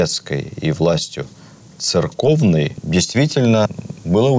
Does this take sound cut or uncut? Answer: cut